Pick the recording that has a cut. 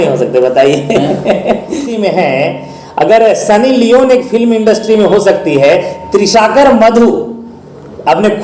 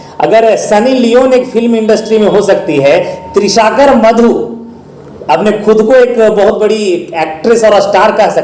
first; 1 cut; at 1.8 s

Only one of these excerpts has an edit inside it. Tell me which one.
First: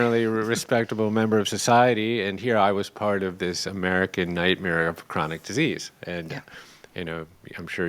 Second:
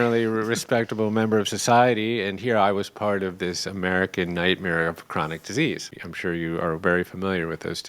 second; 1 cut; at 5.9 s

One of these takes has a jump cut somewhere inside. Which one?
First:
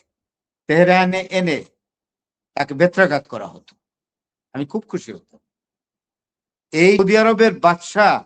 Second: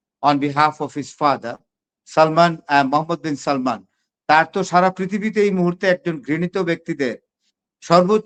first; 1 cut; at 7.0 s

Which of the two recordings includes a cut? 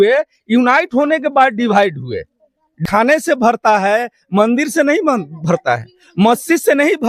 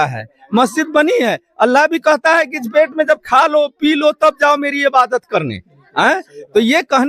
first; 1 cut; at 2.8 s

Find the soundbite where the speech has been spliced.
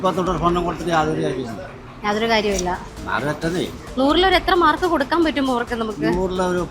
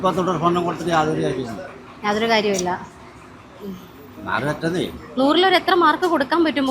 first; 1 cut; at 2.9 s

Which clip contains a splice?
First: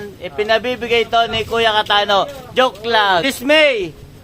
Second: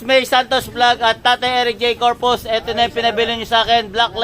first; 2 cuts; at 2.4 s, 3.2 s

